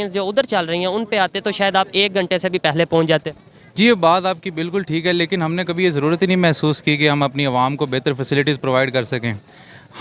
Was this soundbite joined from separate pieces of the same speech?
no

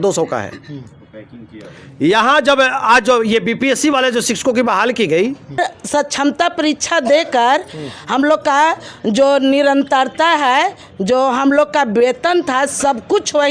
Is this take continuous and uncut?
no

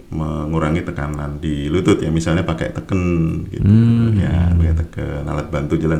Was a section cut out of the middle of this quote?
no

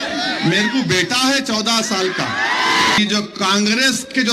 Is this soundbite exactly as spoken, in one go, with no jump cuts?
no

